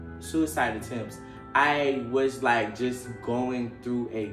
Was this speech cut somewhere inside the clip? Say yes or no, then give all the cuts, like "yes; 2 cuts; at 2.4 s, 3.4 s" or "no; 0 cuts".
no; 0 cuts